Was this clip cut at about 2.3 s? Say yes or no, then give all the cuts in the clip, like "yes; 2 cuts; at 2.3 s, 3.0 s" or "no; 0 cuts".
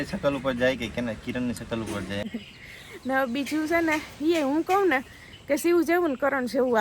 yes; 1 cut; at 2.3 s